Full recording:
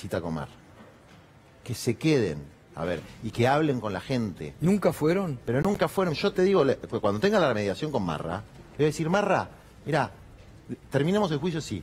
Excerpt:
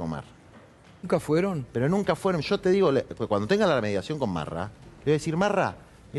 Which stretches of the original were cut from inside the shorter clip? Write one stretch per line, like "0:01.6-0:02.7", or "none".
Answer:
0:01.3-0:04.8